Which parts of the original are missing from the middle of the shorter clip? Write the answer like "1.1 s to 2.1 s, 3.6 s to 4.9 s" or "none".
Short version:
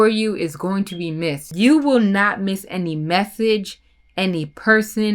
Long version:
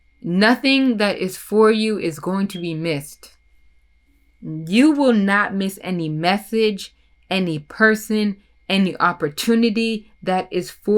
3.1 s to 4.6 s